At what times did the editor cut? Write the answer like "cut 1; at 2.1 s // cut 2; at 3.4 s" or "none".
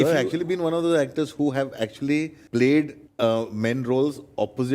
cut 1; at 2.4 s // cut 2; at 3.0 s